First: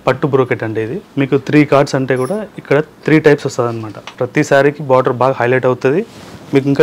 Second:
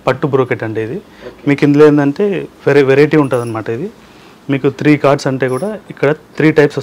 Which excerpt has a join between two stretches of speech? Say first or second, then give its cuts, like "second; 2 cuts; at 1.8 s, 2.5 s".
first; 2 cuts; at 1.0 s, 4.0 s